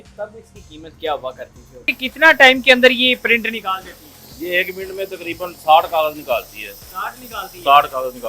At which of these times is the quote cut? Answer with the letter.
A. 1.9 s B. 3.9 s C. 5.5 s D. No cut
A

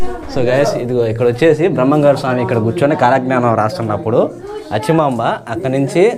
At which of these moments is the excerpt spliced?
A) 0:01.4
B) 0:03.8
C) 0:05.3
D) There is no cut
D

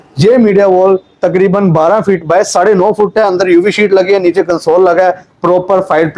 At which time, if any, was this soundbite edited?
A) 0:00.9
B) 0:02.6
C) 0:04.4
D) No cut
D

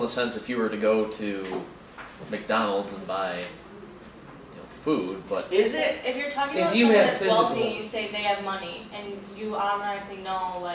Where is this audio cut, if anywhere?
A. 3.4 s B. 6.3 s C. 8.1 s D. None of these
B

